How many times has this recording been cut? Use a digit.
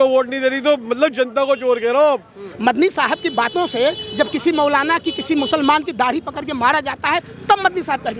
1